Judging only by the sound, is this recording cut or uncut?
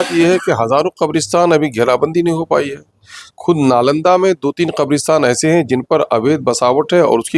uncut